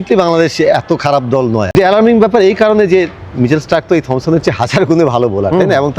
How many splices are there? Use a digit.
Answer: 1